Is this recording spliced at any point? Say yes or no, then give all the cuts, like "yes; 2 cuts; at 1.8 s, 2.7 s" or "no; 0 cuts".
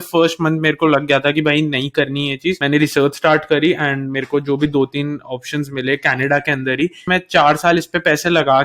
yes; 2 cuts; at 2.6 s, 7.0 s